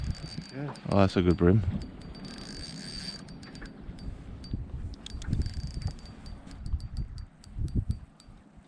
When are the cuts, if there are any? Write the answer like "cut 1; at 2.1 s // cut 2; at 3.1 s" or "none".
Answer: cut 1; at 6.6 s